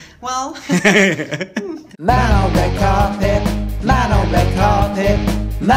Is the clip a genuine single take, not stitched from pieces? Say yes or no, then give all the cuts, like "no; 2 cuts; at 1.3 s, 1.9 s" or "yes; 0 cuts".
no; 1 cut; at 1.7 s